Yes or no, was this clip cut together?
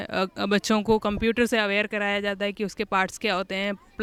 no